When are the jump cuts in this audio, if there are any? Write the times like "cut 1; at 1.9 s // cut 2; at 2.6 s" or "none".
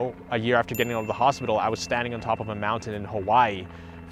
none